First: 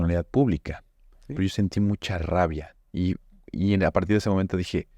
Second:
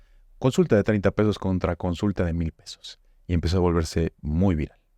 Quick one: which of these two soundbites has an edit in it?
first; 1 cut; at 1.2 s

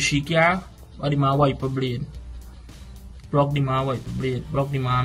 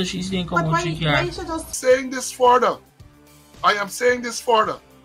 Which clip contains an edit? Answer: second; 1 cut; at 1.7 s

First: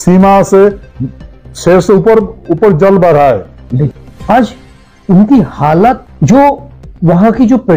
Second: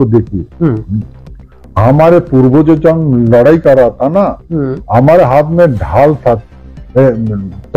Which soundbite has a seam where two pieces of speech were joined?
first; 2 cuts; at 4.0 s, 6.1 s

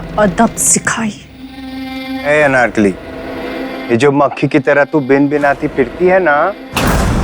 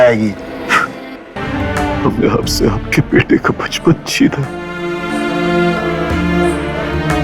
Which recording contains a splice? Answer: second; 1 cut; at 1.4 s

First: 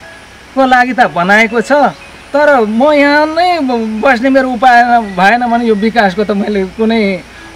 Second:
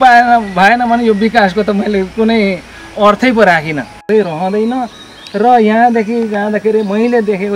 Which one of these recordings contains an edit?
second; 1 cut; at 4.0 s

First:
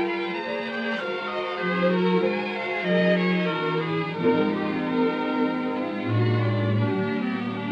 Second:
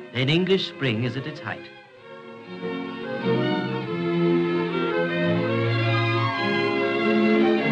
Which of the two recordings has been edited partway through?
second; 1 cut; at 3.8 s

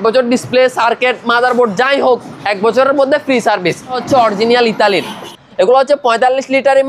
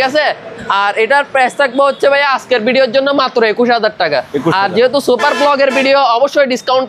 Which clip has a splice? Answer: first; 2 cuts; at 4.0 s, 5.3 s

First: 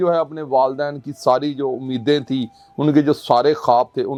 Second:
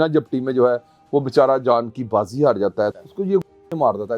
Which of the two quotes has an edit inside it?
second; 1 cut; at 2.9 s

